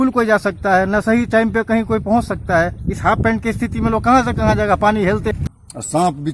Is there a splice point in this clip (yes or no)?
yes